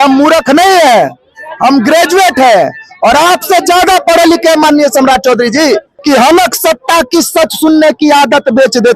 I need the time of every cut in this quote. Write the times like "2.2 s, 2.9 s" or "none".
5.9 s